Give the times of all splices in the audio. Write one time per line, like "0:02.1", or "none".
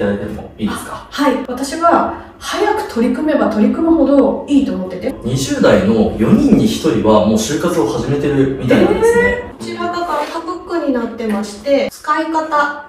0:01.5
0:05.1
0:09.6
0:11.9